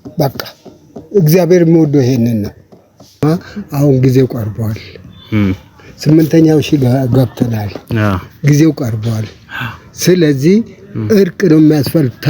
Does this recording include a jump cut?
yes; 1 cut; at 3.2 s

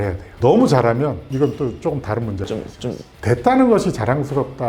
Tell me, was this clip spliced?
yes; 1 cut; at 3.1 s

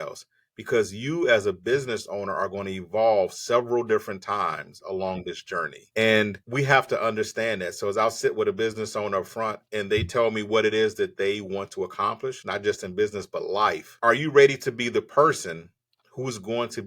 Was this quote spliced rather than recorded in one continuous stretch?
yes; 1 cut; at 13.9 s

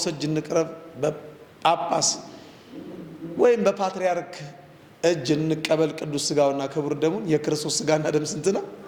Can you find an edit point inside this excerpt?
no; 0 cuts

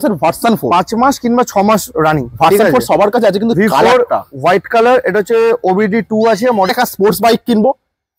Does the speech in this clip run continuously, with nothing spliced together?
no; 1 cut; at 6.7 s

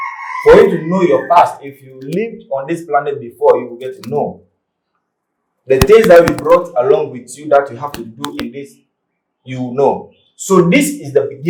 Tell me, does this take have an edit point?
no; 0 cuts

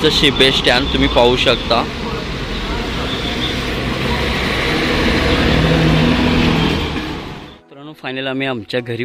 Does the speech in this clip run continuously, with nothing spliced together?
no; 1 cut; at 7.4 s

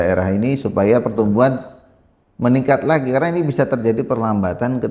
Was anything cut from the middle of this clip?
no; 0 cuts

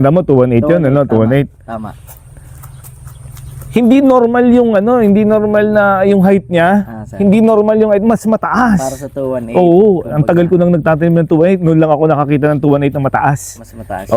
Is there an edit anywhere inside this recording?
no; 0 cuts

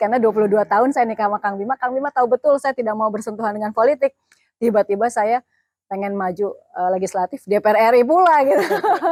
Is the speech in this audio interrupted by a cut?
no; 0 cuts

